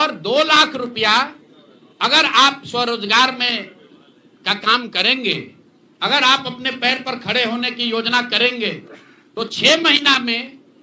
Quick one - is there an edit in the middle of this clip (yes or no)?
no